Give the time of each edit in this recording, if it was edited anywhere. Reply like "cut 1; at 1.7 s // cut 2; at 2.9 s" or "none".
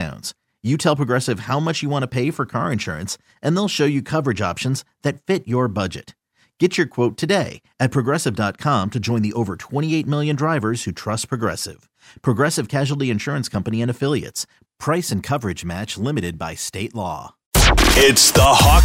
cut 1; at 17.4 s